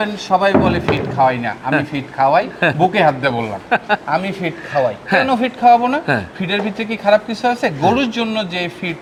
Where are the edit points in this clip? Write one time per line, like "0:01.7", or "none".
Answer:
none